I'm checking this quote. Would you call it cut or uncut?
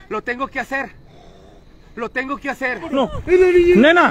cut